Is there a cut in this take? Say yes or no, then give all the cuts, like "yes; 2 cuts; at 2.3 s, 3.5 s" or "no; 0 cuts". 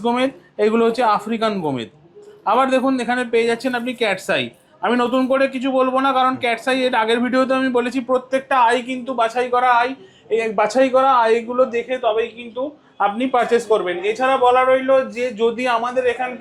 no; 0 cuts